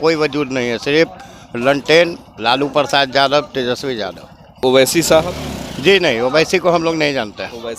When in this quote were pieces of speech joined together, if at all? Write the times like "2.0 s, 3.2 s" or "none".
4.6 s